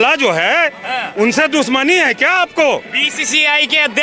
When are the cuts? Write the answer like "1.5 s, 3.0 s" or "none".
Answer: none